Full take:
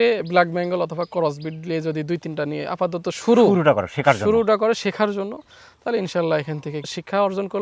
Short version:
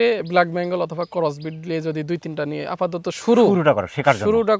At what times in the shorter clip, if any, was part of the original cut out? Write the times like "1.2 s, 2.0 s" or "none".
none

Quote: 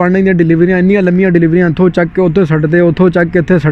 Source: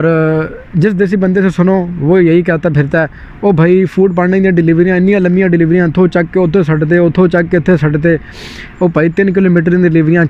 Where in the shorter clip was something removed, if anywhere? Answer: none

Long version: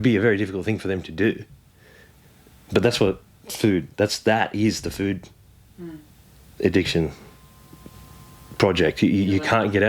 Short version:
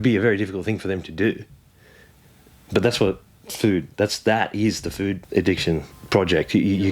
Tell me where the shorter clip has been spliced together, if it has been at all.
5.2 s, 6.0 s

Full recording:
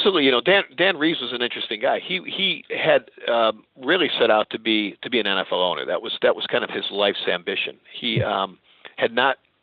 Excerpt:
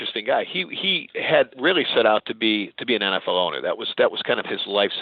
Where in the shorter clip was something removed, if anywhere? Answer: 1.5 s

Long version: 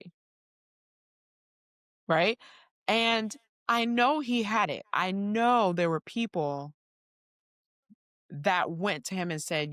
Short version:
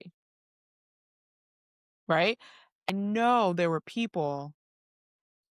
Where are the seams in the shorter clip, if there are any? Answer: 2.9 s

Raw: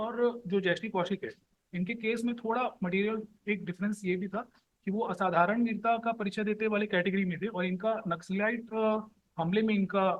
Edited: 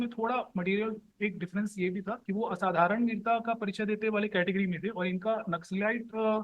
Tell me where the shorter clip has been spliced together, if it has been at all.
2.2 s

